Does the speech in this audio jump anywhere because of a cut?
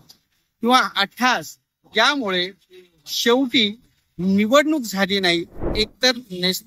yes; 1 cut; at 5.7 s

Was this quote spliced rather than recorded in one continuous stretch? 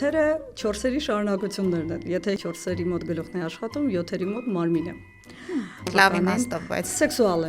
yes; 2 cuts; at 2.4 s, 5.9 s

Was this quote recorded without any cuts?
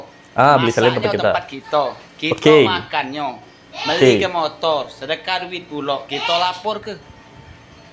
yes; 0 cuts

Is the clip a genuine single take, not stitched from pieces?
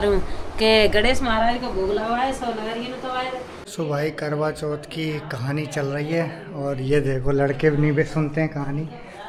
yes; 0 cuts

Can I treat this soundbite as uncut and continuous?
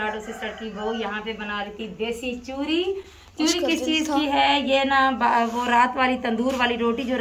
yes; 0 cuts

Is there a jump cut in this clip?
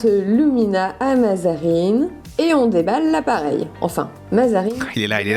no; 0 cuts

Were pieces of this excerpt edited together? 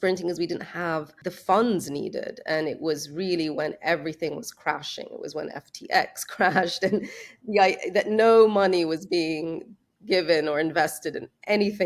yes; 1 cut; at 1.1 s

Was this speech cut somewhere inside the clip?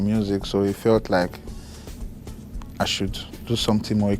no; 0 cuts

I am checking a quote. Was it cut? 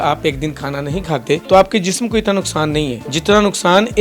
yes; 2 cuts; at 1.4 s, 3.1 s

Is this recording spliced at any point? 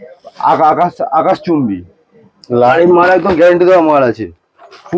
yes; 1 cut; at 2.7 s

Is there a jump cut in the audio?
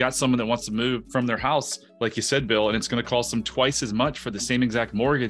yes; 1 cut; at 1.1 s

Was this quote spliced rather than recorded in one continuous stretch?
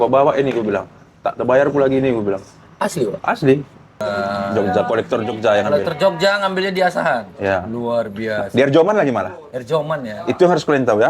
yes; 1 cut; at 3.9 s

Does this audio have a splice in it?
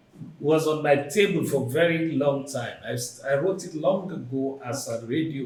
no; 0 cuts

